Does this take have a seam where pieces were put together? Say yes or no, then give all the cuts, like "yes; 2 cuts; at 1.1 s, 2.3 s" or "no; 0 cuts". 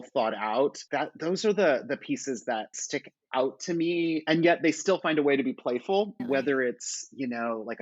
yes; 2 cuts; at 2.8 s, 6.2 s